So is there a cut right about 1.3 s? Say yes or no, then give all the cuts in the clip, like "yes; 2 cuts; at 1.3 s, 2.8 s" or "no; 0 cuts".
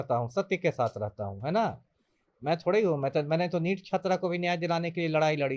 no; 0 cuts